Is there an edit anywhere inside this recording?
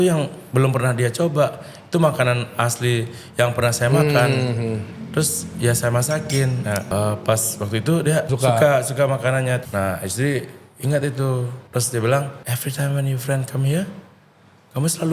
yes; 5 cuts; at 6.9 s, 8.3 s, 9.6 s, 11.6 s, 12.4 s

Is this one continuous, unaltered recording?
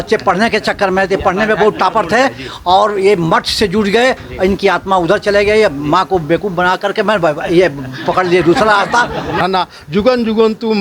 no; 1 cut; at 9.4 s

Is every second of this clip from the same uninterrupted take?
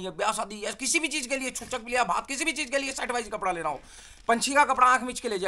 yes; 0 cuts

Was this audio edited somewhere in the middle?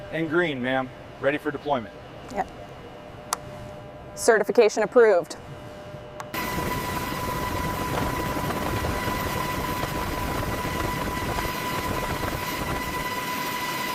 no; 0 cuts

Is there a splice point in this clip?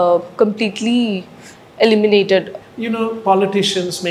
yes; 1 cut; at 2.5 s

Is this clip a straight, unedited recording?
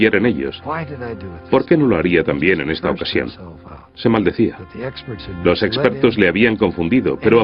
no; 1 cut; at 2.3 s

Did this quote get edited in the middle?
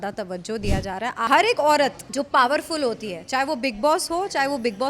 yes; 2 cuts; at 1.3 s, 2.0 s

